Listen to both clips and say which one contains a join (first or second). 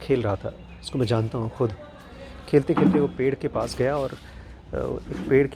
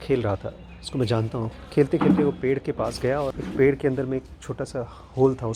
second